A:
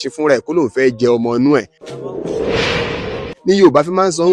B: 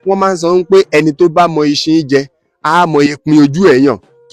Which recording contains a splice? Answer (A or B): A